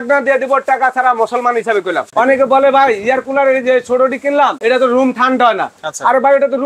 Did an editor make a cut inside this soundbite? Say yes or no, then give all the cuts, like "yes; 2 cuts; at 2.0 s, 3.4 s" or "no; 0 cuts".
yes; 2 cuts; at 2.1 s, 4.6 s